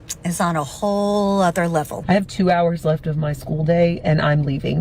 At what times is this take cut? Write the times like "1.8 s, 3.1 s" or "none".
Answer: 1.9 s